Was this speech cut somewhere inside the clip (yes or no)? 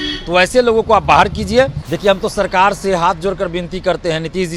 yes